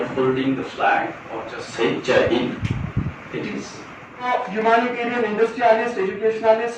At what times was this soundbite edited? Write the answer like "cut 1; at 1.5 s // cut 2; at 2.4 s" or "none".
cut 1; at 4.2 s